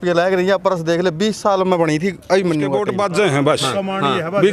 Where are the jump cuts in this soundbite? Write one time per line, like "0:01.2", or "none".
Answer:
0:02.9